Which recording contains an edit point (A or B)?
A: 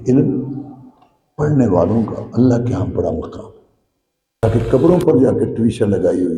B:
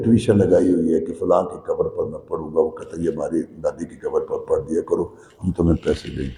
A